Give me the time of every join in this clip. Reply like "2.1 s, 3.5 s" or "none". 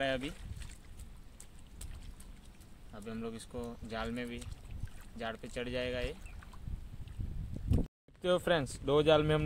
8.0 s